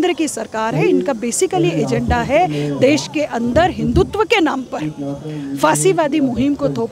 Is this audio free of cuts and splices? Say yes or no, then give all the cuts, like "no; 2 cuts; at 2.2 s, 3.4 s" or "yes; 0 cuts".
yes; 0 cuts